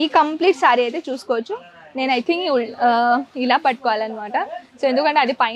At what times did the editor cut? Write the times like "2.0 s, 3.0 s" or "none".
none